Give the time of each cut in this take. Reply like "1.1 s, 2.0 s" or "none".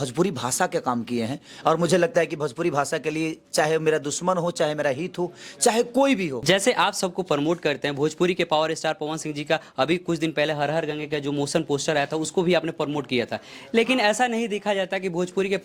6.4 s